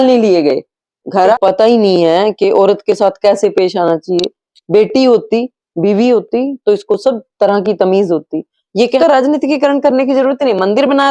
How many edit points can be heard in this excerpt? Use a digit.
2